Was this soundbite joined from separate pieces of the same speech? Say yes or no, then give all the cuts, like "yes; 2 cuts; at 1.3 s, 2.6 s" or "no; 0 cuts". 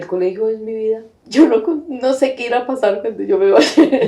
yes; 1 cut; at 1.2 s